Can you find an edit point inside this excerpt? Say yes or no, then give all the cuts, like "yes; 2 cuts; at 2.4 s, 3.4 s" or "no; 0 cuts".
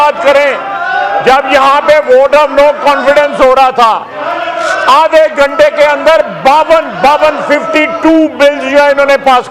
no; 0 cuts